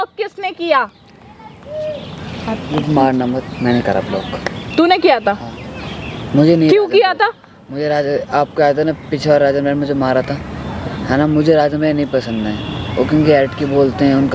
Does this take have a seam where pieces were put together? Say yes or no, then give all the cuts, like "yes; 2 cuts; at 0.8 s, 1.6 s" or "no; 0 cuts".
no; 0 cuts